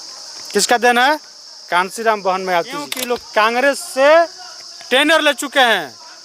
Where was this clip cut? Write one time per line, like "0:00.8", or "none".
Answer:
0:03.0